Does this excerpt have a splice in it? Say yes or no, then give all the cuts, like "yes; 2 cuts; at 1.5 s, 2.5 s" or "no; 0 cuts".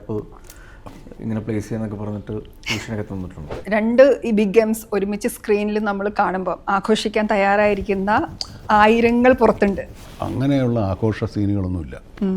yes; 2 cuts; at 3.5 s, 9.9 s